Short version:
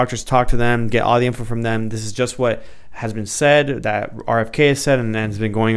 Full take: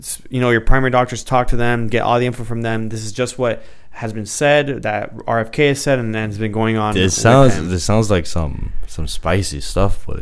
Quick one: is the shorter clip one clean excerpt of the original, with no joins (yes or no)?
yes